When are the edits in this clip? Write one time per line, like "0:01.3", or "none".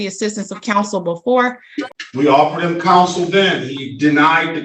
0:01.7